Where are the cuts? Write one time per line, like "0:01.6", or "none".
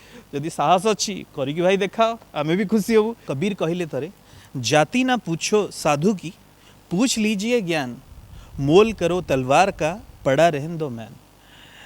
0:03.3